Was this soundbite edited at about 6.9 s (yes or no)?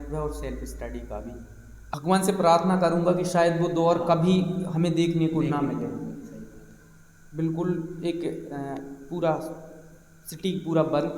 no